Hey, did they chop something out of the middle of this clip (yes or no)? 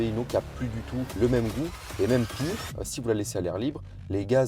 yes